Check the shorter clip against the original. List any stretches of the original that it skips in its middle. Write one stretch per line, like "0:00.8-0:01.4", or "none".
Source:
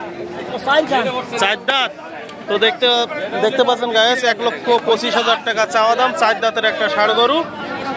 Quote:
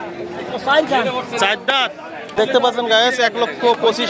0:02.3-0:03.4